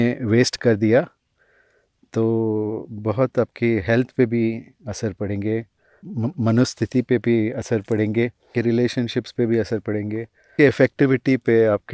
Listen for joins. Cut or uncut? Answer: cut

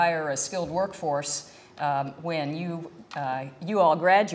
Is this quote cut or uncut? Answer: cut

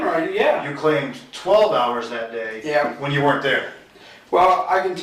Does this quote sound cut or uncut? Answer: uncut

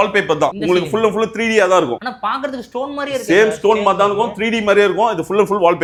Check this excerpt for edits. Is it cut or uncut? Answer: uncut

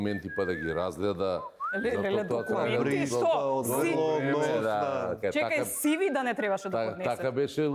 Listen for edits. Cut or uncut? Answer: uncut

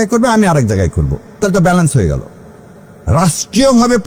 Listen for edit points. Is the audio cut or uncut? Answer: uncut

